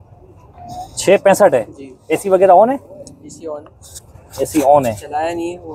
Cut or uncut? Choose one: uncut